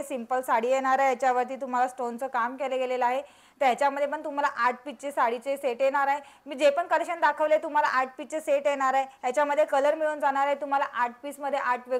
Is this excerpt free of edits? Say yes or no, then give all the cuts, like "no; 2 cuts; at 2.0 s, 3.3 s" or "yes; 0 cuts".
yes; 0 cuts